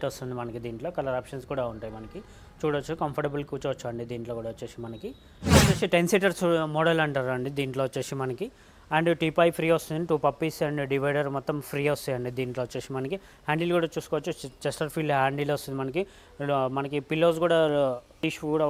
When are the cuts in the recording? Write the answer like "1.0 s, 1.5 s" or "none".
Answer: none